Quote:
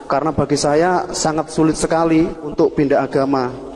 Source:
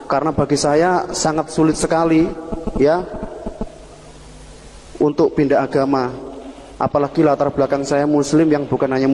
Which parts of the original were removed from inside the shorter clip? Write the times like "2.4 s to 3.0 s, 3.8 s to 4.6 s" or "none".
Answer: 2.5 s to 5.1 s